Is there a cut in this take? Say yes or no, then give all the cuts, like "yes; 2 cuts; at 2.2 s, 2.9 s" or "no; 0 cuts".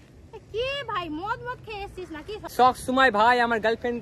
yes; 1 cut; at 2.5 s